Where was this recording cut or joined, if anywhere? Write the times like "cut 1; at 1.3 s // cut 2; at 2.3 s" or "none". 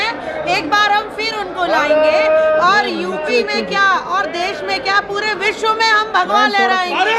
none

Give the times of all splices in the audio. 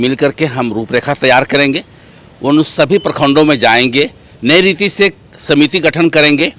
none

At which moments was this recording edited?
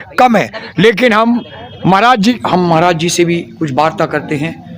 cut 1; at 2.4 s

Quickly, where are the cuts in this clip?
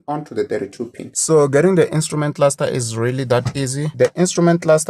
cut 1; at 1.1 s // cut 2; at 3.9 s

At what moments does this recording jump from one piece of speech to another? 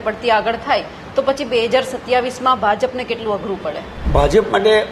cut 1; at 3.9 s

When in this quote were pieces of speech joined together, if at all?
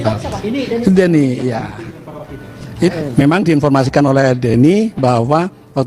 cut 1; at 2.9 s

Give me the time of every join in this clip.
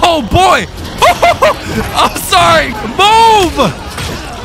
cut 1; at 2.7 s

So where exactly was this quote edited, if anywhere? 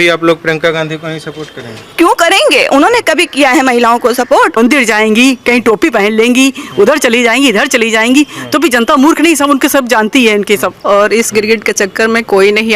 cut 1; at 4.6 s // cut 2; at 10.8 s

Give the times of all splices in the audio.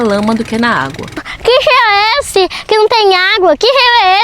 cut 1; at 1.3 s

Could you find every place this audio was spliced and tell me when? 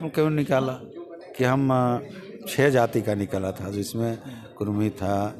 none

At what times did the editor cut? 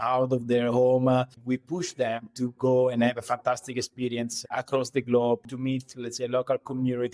cut 1; at 1.4 s // cut 2; at 5.5 s

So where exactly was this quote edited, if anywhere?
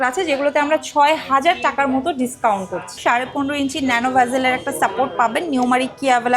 cut 1; at 3.0 s

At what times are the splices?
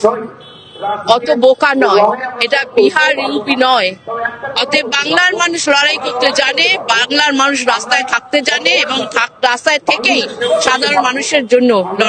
none

